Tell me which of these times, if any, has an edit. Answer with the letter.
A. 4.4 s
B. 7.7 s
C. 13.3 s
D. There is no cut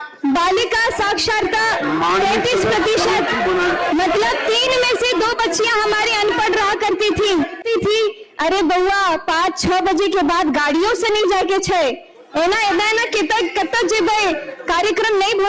B